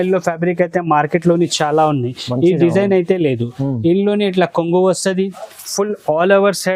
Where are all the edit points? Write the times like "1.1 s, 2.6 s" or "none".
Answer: none